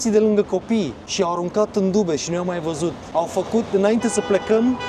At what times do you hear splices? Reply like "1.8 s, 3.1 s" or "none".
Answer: none